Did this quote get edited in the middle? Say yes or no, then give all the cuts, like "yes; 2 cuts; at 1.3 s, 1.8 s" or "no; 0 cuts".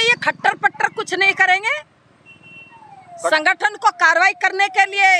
no; 0 cuts